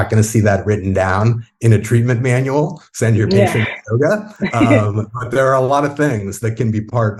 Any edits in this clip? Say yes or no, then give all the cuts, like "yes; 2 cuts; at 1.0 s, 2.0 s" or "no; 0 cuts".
no; 0 cuts